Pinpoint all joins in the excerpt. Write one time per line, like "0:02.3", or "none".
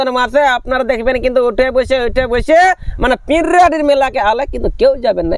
none